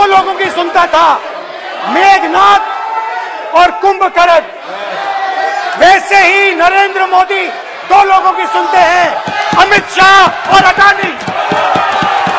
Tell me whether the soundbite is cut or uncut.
uncut